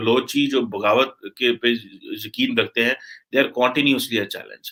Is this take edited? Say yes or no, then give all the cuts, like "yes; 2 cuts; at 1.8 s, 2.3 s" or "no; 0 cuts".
no; 0 cuts